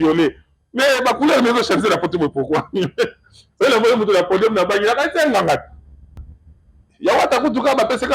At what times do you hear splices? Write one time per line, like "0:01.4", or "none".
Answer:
0:06.2